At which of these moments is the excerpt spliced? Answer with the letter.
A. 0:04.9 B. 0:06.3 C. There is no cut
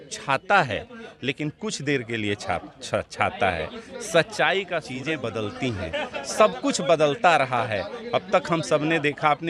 A